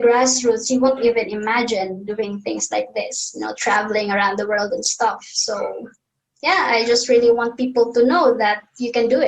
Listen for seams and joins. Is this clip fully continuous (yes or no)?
yes